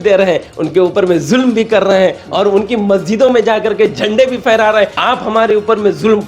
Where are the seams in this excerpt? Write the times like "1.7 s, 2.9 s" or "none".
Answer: 4.9 s